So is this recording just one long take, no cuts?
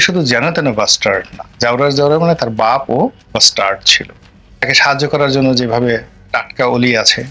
no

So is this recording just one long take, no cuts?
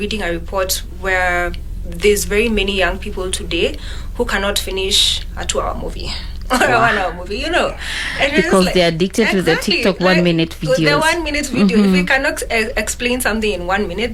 yes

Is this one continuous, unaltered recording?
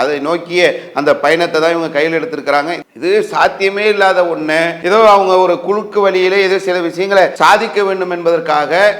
no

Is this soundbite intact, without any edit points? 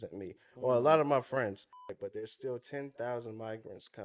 no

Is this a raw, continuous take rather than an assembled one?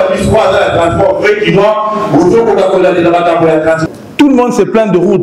no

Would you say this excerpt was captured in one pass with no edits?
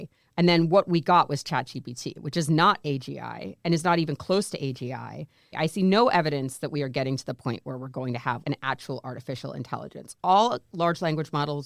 yes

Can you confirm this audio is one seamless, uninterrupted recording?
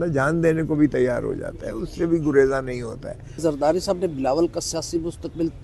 no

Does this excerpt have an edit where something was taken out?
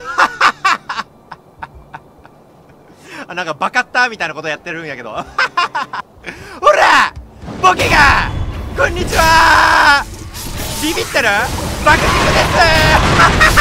yes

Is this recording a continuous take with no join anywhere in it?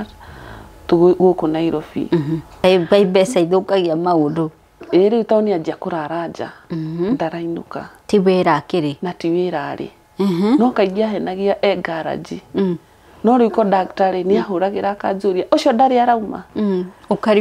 no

